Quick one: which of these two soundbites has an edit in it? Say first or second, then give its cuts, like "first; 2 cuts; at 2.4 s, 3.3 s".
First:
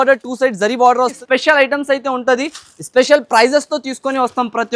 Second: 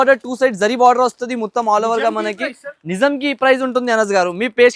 first; 1 cut; at 1.2 s